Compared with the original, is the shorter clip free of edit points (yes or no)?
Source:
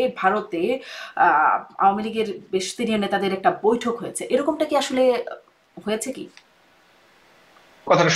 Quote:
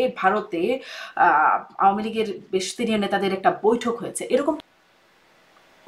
no